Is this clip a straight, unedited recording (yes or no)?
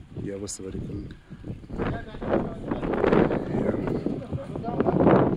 yes